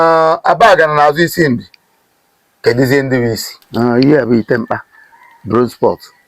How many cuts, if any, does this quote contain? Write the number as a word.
one